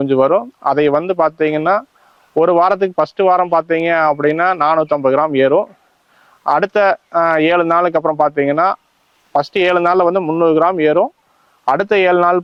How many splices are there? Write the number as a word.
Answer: zero